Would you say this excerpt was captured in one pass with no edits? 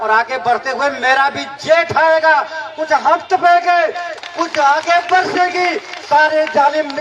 yes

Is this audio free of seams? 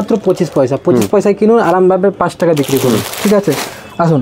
yes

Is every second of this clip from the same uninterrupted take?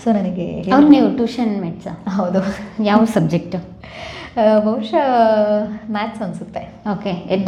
yes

